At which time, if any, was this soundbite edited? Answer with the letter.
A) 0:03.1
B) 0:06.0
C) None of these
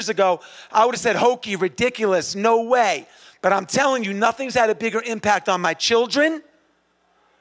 C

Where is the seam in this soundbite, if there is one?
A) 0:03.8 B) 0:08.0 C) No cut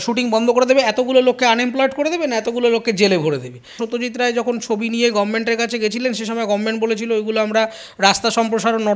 A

